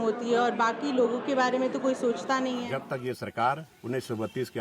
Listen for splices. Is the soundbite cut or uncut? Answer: cut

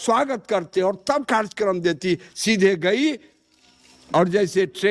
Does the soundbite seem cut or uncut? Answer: uncut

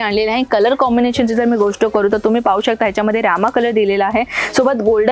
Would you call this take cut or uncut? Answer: uncut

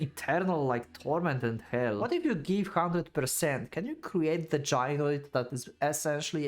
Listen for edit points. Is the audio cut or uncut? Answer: cut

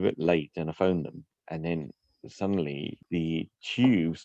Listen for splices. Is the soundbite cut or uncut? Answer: cut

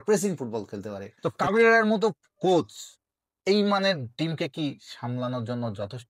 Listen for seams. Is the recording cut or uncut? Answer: cut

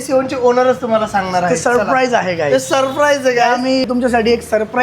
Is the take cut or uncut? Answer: cut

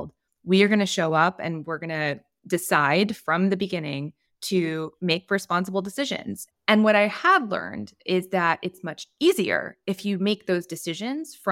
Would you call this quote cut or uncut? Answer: cut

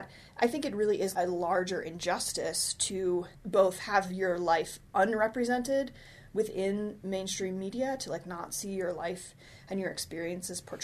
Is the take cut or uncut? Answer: cut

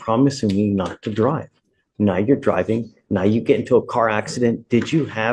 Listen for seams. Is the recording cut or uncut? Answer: uncut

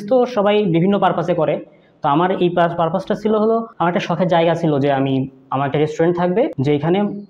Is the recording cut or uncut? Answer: uncut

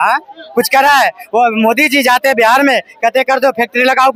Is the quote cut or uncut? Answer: uncut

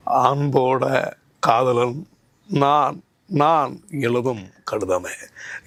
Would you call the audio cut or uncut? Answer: uncut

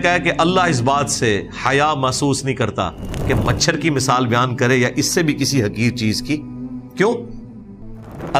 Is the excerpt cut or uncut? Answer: uncut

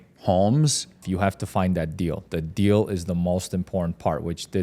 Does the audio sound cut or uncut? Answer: cut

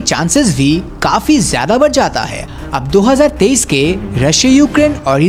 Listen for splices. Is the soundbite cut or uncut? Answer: uncut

